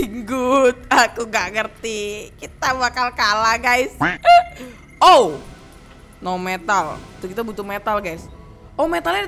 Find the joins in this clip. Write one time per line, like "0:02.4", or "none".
none